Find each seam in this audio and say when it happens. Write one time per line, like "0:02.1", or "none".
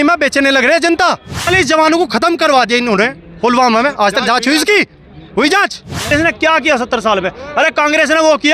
0:01.5
0:06.1